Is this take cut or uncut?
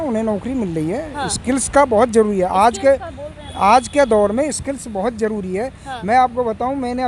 uncut